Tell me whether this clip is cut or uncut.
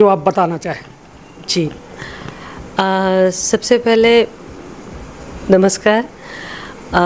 uncut